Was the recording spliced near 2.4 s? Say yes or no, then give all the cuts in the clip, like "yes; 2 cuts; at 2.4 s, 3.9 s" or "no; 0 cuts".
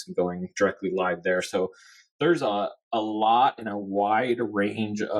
no; 0 cuts